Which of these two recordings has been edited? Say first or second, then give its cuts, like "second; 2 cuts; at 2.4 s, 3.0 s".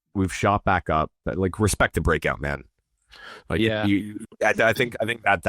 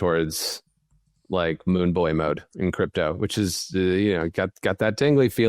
first; 1 cut; at 1.2 s